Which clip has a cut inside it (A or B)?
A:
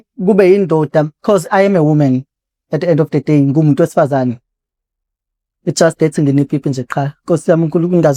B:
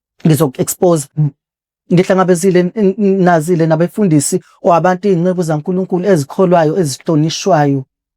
B